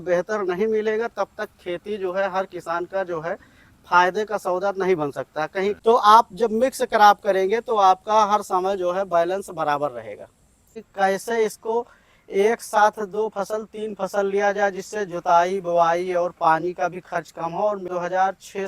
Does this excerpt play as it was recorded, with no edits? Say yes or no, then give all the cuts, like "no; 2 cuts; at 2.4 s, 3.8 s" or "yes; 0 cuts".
no; 3 cuts; at 5.8 s, 10.8 s, 17.9 s